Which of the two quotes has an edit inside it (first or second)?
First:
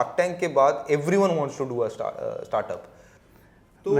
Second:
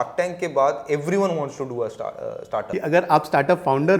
second